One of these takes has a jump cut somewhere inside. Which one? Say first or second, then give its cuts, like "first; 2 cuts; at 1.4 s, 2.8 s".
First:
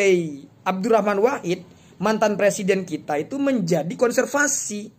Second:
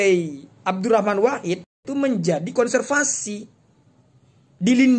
second; 1 cut; at 1.8 s